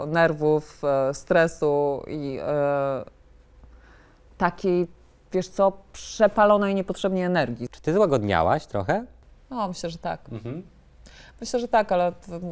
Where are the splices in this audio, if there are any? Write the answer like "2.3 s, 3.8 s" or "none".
7.7 s